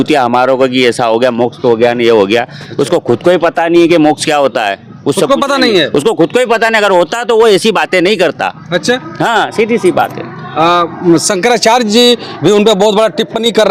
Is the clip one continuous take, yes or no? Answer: yes